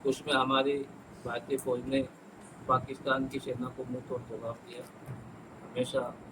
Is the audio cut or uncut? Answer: uncut